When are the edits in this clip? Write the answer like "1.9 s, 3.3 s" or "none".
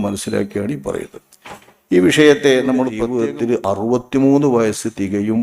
3.0 s